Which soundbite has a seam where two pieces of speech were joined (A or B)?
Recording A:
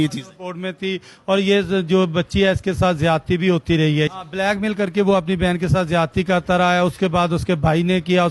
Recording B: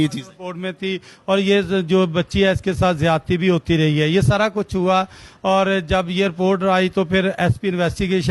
A